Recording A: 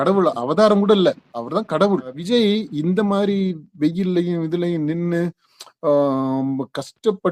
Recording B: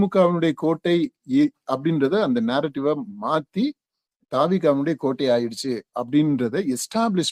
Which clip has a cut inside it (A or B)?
A